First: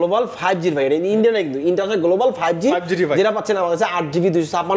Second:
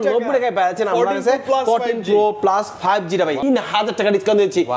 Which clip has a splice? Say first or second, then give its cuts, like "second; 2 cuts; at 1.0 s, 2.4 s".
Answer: second; 1 cut; at 3.4 s